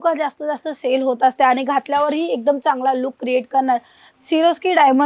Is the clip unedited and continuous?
no; 1 cut; at 4.0 s

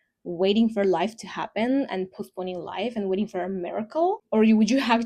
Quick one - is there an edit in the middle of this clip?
no; 0 cuts

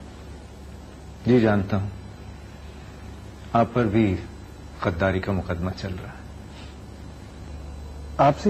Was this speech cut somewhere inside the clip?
yes; 1 cut; at 7.5 s

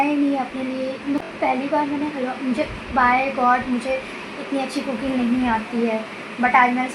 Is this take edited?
no; 0 cuts

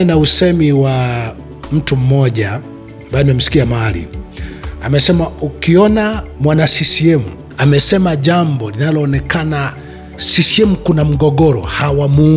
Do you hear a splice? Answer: yes; 2 cuts; at 6.3 s, 7.4 s

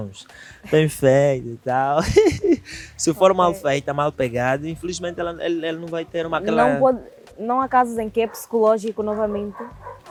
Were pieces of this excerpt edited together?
no; 0 cuts

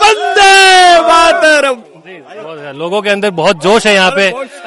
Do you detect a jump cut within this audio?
no; 0 cuts

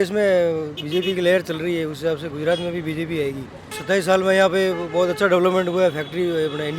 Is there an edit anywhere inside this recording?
yes; 1 cut; at 3.7 s

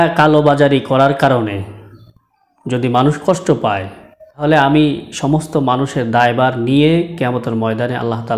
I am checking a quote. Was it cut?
yes; 1 cut; at 4.4 s

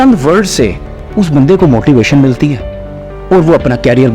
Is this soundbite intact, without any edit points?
yes; 0 cuts

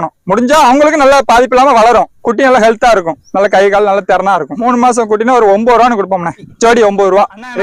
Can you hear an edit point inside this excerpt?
yes; 1 cut; at 2.2 s

